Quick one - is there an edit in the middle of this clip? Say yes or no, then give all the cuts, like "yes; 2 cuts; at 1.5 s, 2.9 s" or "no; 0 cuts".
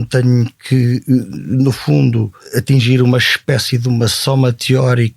yes; 1 cut; at 2.4 s